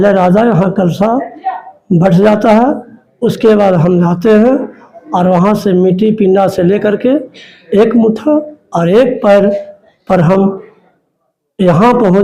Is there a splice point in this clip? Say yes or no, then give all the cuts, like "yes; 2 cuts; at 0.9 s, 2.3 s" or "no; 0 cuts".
no; 0 cuts